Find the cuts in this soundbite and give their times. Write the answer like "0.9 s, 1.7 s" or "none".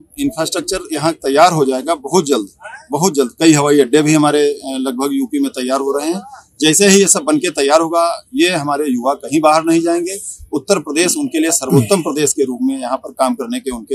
none